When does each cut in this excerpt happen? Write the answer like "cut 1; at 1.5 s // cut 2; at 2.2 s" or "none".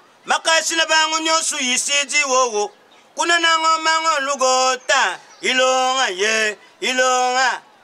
none